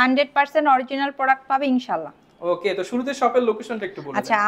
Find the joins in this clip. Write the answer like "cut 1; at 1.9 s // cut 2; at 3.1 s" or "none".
none